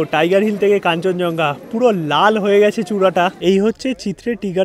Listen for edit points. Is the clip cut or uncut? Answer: cut